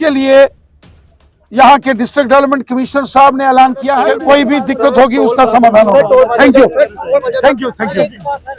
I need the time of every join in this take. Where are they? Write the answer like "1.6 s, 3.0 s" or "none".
3.9 s